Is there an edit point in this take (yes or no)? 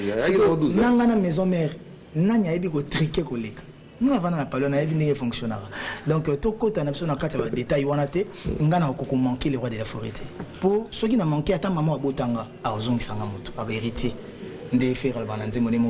no